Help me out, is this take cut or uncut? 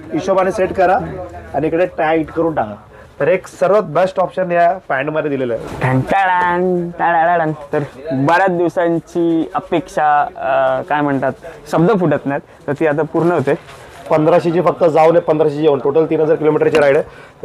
cut